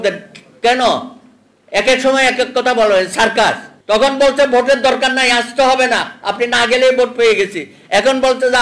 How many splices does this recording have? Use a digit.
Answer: 1